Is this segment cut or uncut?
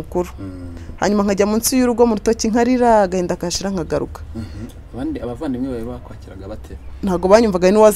uncut